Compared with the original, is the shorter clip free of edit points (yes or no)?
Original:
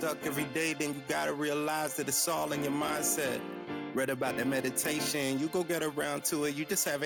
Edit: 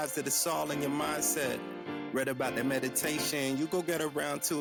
yes